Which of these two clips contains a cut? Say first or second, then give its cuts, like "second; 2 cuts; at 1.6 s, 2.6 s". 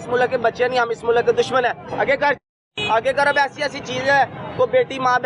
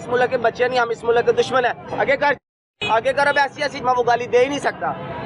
second; 1 cut; at 3.8 s